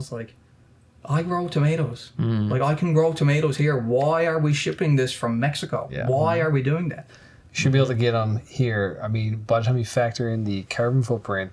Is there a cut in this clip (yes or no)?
no